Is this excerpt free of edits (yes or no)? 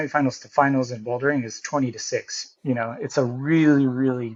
yes